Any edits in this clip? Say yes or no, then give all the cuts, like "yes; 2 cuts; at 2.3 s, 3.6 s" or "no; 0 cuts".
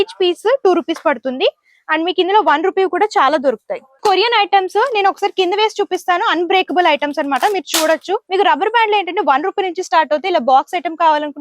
yes; 2 cuts; at 4.0 s, 8.2 s